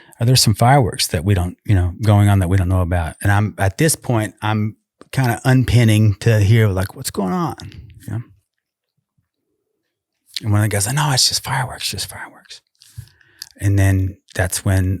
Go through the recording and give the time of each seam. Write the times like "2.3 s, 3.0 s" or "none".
3.2 s